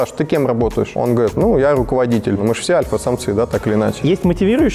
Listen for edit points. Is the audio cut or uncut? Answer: cut